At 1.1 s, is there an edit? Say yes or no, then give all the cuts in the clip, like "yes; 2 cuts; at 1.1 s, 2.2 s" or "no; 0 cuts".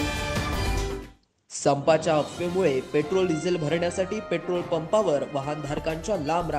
yes; 1 cut; at 1.1 s